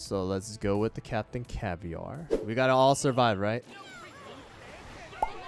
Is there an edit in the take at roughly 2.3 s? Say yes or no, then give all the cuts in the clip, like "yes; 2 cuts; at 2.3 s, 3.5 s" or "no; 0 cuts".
yes; 1 cut; at 2.3 s